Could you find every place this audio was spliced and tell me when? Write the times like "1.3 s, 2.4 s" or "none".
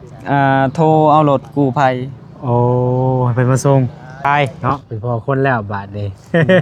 4.2 s